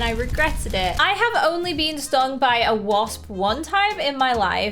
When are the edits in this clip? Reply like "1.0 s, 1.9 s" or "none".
1.0 s